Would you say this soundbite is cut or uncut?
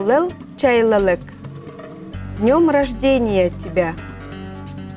cut